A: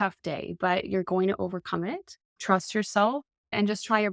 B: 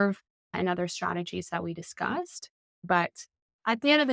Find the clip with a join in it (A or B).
B